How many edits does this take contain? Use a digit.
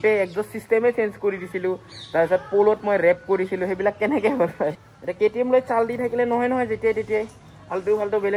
1